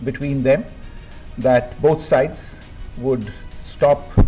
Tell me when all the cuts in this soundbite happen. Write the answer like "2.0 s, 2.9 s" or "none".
none